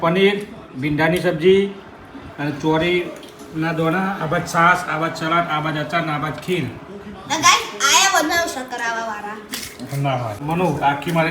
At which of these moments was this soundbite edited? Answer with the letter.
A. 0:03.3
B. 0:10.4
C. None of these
B